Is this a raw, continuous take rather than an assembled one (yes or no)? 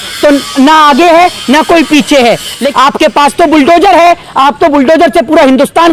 no